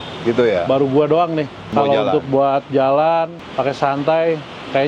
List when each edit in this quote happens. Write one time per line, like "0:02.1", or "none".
0:01.7
0:03.4